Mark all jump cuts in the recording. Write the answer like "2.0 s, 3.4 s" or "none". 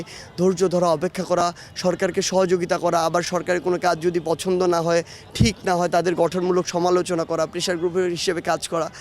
none